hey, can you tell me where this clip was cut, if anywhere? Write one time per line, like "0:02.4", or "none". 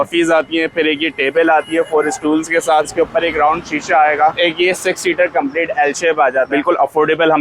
0:02.9
0:04.4
0:06.5